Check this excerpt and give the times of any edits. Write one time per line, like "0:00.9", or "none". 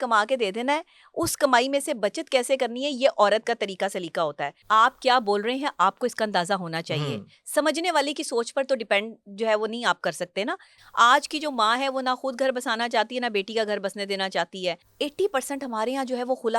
0:04.5
0:10.7
0:14.9